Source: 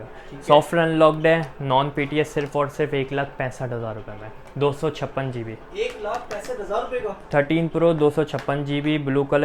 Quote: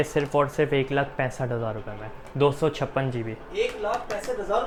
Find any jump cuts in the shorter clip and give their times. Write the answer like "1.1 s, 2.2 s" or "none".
none